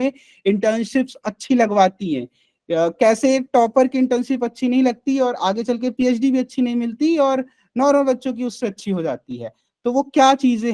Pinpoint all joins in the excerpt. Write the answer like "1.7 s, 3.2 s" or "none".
none